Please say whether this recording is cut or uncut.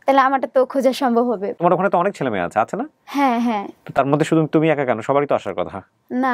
cut